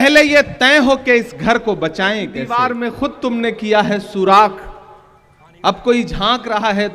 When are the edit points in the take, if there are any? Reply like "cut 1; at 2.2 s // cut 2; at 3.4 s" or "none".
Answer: cut 1; at 2.5 s